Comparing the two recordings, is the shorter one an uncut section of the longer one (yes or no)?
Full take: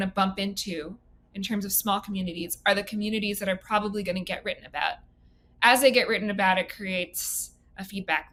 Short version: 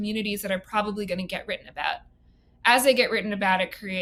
yes